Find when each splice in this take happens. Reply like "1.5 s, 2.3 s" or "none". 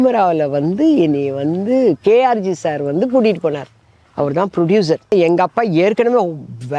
5.1 s

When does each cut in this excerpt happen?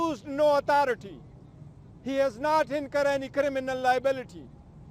none

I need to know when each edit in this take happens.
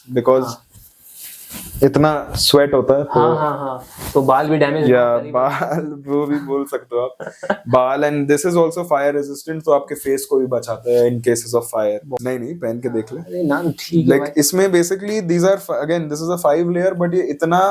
12.1 s

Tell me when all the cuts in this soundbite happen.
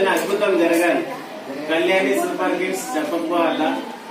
none

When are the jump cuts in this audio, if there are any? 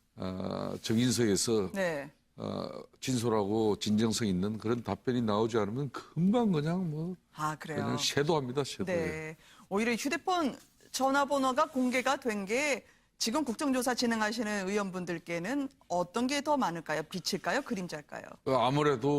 16.4 s

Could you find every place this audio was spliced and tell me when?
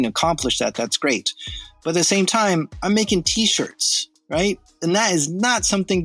none

